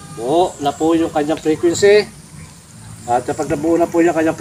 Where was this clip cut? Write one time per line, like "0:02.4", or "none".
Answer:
none